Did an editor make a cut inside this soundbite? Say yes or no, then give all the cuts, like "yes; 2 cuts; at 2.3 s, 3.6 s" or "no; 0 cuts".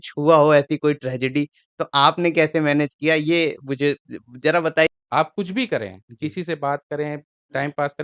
yes; 1 cut; at 4.9 s